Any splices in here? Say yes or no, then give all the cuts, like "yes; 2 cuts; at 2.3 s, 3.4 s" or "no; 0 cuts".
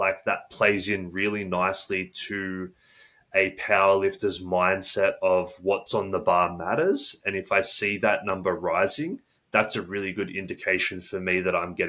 no; 0 cuts